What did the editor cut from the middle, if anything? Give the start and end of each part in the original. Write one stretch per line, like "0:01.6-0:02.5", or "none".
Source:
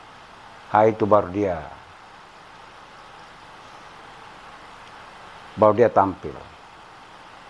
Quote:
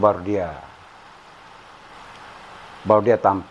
0:03.0-0:04.6